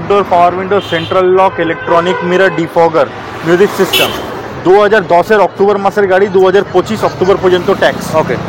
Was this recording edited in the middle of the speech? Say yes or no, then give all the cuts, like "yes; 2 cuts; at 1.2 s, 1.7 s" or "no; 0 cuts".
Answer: no; 0 cuts